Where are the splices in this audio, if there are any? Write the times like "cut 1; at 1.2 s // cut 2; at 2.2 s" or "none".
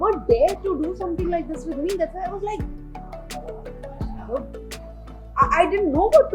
none